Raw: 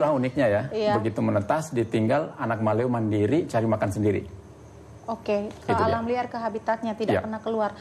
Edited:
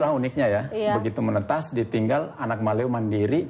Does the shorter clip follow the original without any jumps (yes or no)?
yes